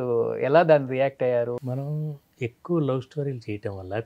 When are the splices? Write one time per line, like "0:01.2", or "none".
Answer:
0:01.6